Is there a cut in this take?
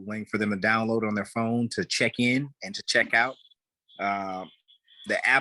no; 0 cuts

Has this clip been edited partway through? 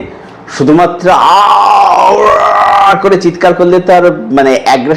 no; 0 cuts

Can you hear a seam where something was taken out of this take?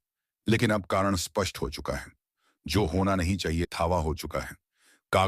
yes; 1 cut; at 3.7 s

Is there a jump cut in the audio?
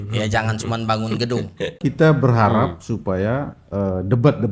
yes; 1 cut; at 1.8 s

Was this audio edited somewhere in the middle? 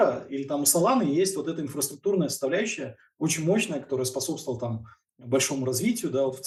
no; 0 cuts

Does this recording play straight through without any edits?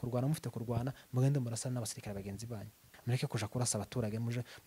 no; 1 cut; at 2.9 s

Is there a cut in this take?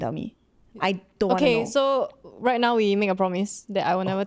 no; 0 cuts

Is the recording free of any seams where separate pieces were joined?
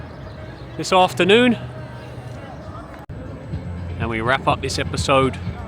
no; 1 cut; at 3.1 s

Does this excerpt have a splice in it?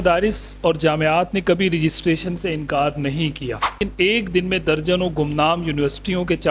yes; 1 cut; at 3.8 s

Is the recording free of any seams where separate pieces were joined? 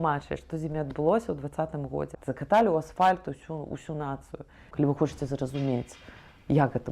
no; 2 cuts; at 2.2 s, 4.7 s

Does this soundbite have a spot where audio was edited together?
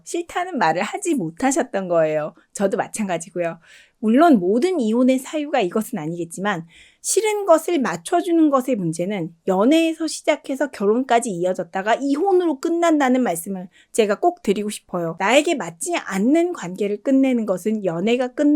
yes; 1 cut; at 15.1 s

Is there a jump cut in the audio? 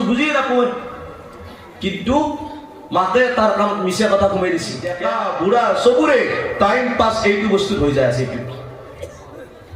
yes; 1 cut; at 4.9 s

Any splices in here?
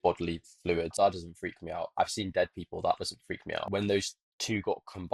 yes; 2 cuts; at 0.9 s, 3.7 s

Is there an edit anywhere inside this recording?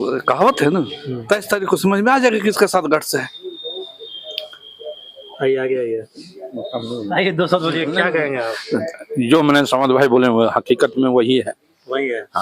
no; 0 cuts

